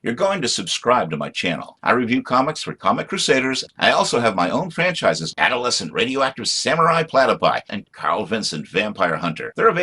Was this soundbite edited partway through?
no; 0 cuts

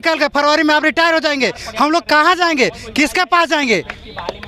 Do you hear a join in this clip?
no; 0 cuts

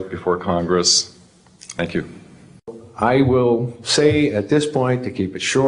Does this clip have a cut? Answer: yes; 1 cut; at 2.7 s

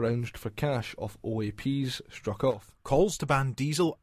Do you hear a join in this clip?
yes; 1 cut; at 2.7 s

